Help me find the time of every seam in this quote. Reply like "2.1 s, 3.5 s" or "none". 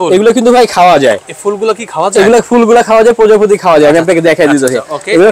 none